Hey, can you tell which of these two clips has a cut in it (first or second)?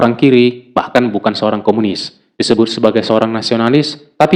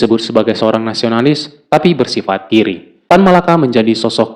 second